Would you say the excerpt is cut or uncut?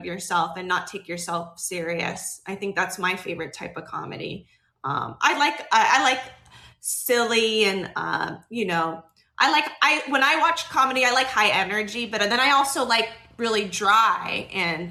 uncut